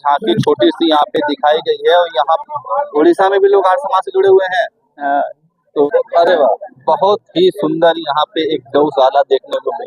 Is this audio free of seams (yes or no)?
no